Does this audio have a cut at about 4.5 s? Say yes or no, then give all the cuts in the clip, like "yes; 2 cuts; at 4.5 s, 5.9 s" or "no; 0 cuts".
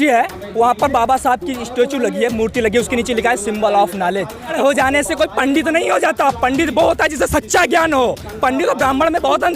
yes; 1 cut; at 4.5 s